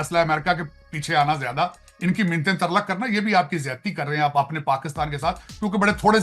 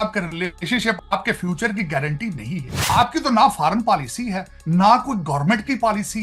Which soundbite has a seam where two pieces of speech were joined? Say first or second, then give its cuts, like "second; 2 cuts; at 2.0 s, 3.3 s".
second; 2 cuts; at 1.0 s, 2.7 s